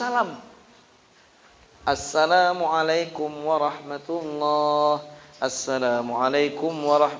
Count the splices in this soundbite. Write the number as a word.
zero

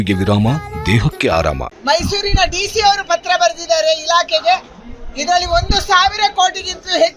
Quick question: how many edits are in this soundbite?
zero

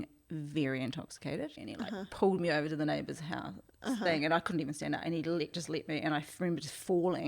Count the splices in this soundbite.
one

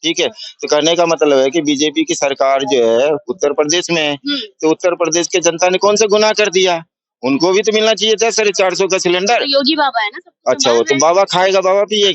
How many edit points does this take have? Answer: zero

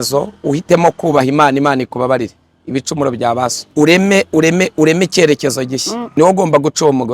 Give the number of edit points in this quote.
two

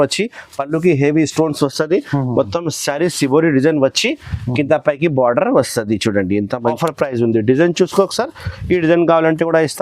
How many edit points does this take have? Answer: one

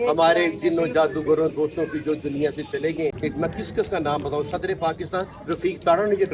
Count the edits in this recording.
one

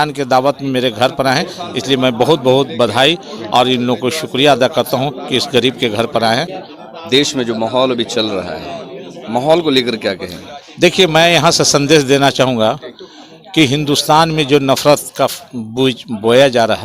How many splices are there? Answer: one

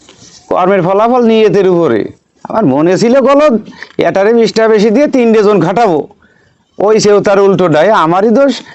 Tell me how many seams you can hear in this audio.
zero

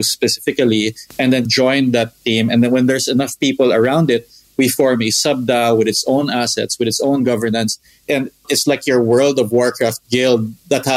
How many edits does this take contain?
two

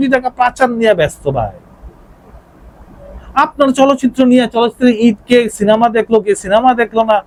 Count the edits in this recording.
zero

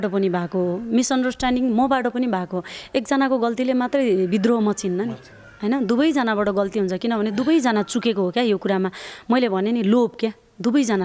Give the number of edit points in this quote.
zero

